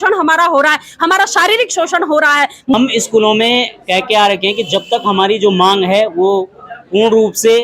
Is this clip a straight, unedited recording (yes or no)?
no